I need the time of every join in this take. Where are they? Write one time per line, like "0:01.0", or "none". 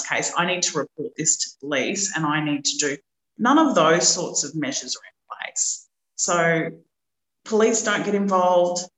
none